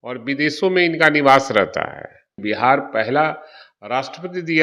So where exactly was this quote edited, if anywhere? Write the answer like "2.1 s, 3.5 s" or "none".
2.3 s